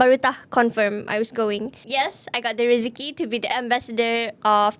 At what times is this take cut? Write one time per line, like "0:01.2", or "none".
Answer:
0:01.8
0:03.5